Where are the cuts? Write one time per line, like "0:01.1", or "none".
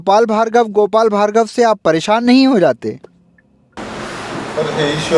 0:03.8